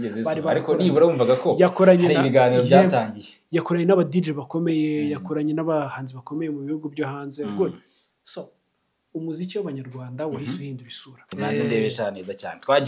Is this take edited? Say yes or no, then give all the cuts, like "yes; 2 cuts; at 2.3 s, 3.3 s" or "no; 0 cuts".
yes; 1 cut; at 11.3 s